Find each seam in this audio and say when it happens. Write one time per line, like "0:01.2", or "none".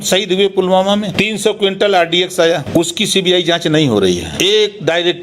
0:01.1
0:02.7
0:04.3